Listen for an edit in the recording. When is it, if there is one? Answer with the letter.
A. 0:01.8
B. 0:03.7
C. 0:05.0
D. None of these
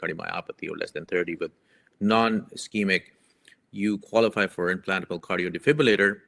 D